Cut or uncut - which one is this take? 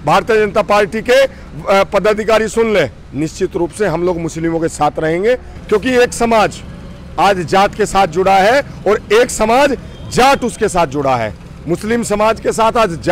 cut